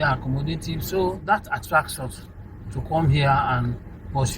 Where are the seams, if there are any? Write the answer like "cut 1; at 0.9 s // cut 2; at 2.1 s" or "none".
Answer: cut 1; at 1.2 s

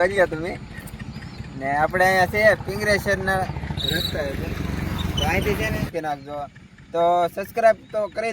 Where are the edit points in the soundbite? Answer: cut 1; at 5.9 s

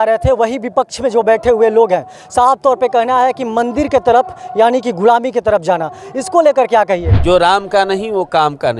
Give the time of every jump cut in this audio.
cut 1; at 7.1 s

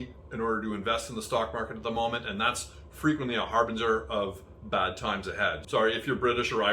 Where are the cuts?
cut 1; at 5.6 s

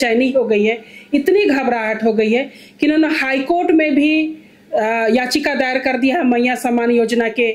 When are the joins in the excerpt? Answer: none

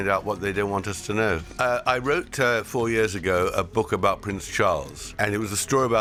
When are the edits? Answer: none

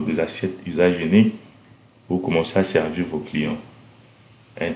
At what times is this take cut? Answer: none

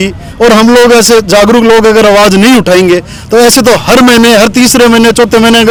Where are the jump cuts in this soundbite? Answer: none

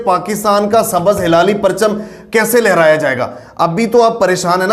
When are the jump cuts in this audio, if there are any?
none

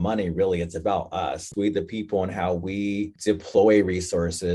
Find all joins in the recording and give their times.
cut 1; at 1.5 s // cut 2; at 3.1 s

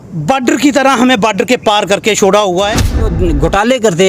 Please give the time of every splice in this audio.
cut 1; at 3.1 s

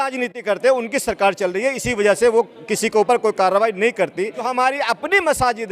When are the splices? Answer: cut 1; at 4.4 s

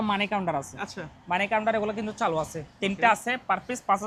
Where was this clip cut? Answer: none

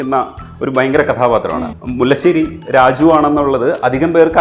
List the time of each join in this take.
cut 1; at 1.7 s

